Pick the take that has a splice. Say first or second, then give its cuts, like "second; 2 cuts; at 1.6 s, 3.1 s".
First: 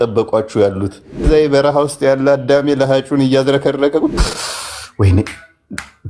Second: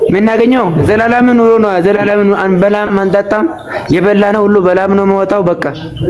first; 2 cuts; at 1.2 s, 4.2 s